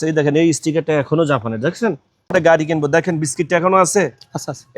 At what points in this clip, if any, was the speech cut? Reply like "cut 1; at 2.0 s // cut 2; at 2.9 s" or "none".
cut 1; at 2.3 s